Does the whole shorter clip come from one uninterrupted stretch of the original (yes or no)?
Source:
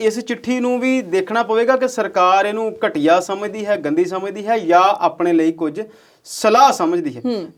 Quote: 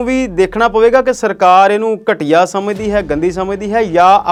yes